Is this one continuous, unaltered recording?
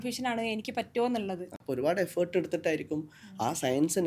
no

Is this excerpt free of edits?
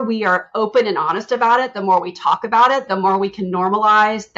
yes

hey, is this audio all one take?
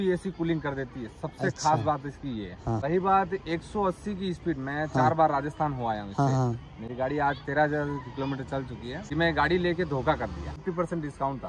no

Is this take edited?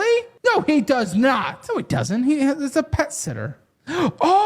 yes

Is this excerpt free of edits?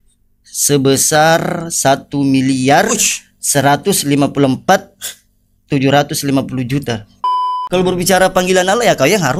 no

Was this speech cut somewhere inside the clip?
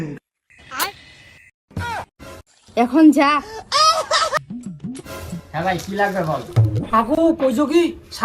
yes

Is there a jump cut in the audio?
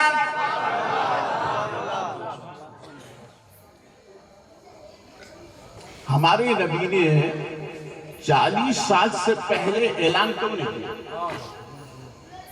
no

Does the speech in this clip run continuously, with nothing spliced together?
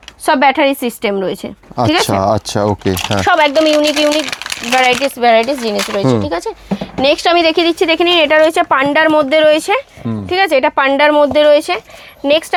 yes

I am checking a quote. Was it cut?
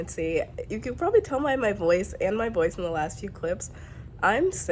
no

